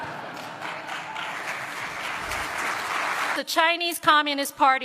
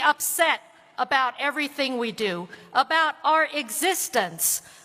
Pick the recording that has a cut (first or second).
first